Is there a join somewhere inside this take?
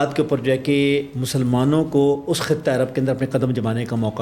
no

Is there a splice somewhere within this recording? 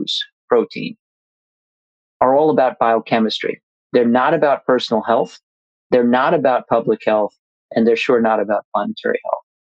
no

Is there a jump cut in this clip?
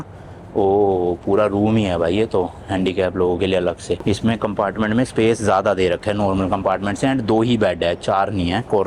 no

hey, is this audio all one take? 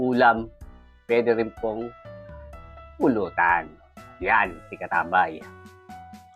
no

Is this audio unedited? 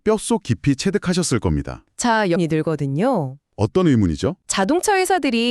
no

